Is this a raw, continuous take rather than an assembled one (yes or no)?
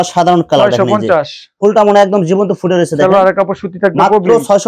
yes